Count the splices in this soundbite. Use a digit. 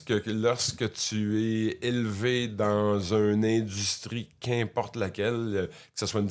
0